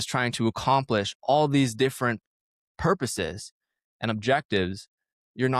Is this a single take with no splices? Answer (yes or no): yes